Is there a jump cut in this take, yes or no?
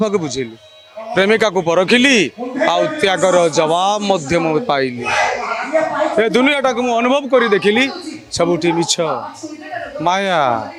no